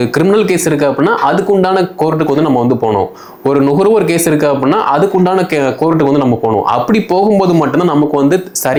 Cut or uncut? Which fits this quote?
uncut